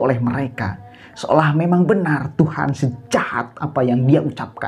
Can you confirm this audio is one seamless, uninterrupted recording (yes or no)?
yes